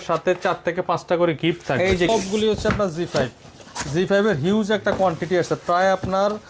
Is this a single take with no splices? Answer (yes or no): no